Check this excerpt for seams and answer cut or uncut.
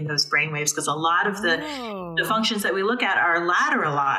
uncut